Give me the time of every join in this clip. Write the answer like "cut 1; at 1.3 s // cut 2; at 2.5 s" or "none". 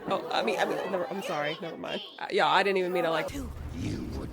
cut 1; at 3.3 s